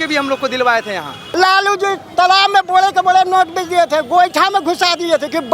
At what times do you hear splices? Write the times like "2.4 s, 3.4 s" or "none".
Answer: 1.3 s